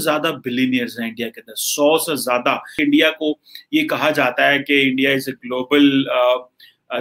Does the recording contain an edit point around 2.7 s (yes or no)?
yes